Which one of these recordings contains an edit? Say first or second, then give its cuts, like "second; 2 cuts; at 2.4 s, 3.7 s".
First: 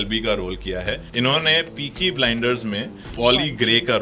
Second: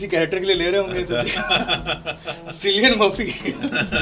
first; 2 cuts; at 1.1 s, 3.1 s